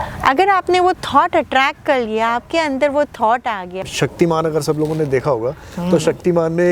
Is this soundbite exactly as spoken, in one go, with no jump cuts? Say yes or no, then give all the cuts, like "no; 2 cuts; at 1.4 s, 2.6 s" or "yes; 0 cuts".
no; 1 cut; at 3.8 s